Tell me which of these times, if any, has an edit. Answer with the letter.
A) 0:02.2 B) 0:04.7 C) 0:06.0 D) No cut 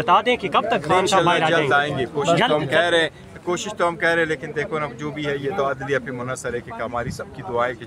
D